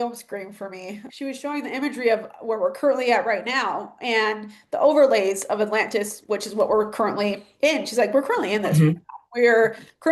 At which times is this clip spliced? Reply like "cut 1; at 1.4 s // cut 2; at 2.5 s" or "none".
cut 1; at 1.0 s